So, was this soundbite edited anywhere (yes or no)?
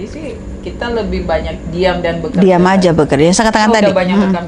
no